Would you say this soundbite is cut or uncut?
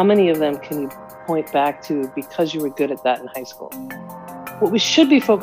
cut